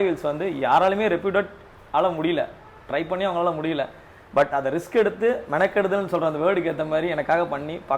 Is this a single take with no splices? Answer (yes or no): yes